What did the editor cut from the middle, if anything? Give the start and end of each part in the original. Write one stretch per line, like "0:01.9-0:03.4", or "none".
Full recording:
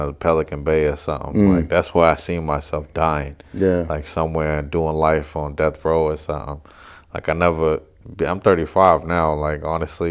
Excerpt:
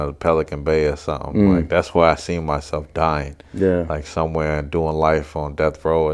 none